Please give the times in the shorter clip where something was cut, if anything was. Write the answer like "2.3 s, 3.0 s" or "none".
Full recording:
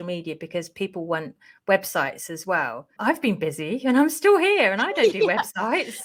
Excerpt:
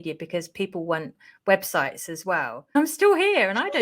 2.8 s